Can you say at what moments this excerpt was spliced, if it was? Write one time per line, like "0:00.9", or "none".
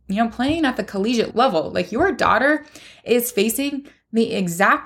0:01.3